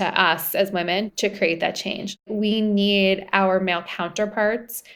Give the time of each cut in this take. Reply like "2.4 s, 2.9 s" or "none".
none